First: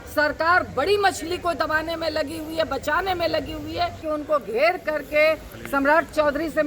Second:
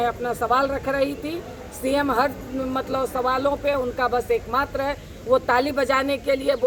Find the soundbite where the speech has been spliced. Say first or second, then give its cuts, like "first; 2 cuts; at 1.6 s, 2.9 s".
first; 1 cut; at 4.0 s